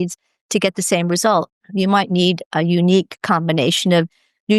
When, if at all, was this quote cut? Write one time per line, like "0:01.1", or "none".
none